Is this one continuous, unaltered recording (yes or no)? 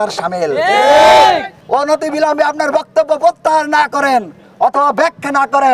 no